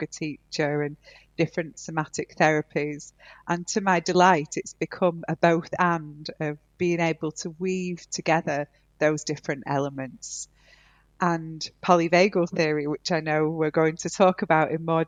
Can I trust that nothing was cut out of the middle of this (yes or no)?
yes